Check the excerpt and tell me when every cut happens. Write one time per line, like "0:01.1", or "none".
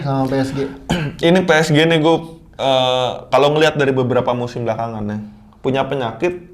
none